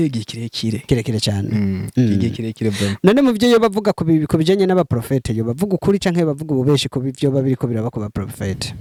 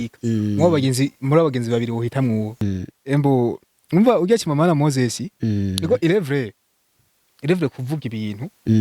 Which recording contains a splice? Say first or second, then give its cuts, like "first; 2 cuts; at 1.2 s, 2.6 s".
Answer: second; 1 cut; at 2.6 s